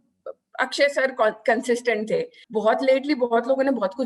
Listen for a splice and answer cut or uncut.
cut